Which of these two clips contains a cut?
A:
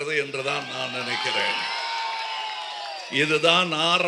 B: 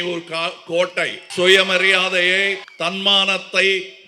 B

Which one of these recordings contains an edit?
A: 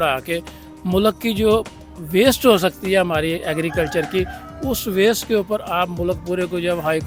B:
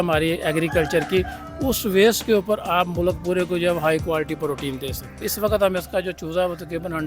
B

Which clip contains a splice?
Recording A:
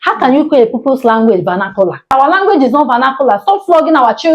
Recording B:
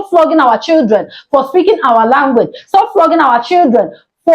A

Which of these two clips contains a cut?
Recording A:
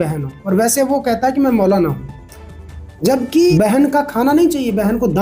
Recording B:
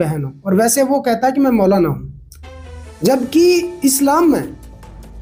A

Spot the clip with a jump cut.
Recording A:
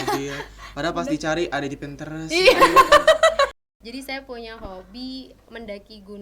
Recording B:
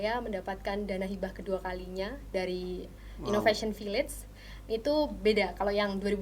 A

